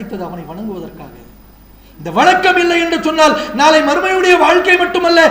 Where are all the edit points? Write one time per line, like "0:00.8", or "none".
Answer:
none